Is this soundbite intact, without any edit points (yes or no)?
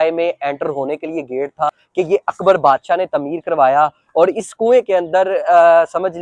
no